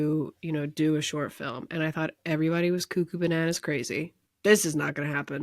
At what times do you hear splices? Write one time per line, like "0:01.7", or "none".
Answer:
0:04.2